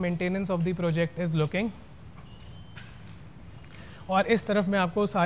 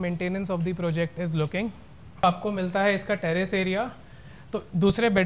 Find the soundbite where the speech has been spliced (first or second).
second